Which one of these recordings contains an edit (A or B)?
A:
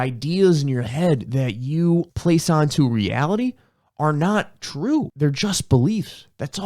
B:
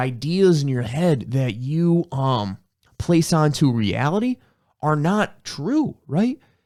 A